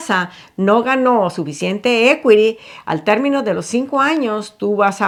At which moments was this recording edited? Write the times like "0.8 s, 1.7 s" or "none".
none